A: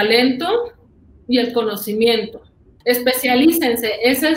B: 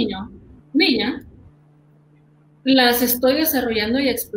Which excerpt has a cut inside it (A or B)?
A